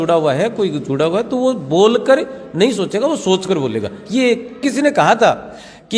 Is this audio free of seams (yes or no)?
no